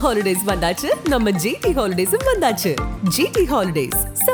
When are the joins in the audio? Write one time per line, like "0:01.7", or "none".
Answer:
none